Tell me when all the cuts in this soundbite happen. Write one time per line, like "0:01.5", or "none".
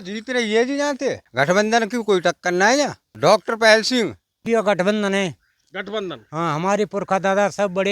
0:01.2
0:02.6
0:04.4